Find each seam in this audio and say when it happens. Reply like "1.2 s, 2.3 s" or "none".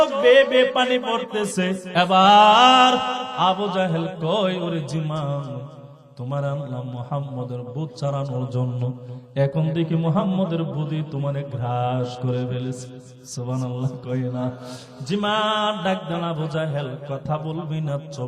1.8 s